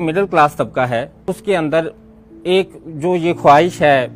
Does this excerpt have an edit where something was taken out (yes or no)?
yes